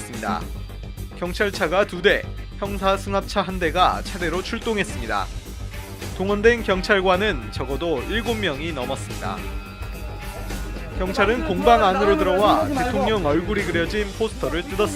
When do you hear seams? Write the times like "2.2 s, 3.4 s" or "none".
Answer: 2.4 s